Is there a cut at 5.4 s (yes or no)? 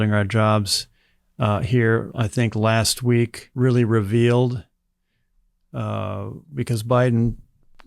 no